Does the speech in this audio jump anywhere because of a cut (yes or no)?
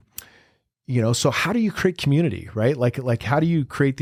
no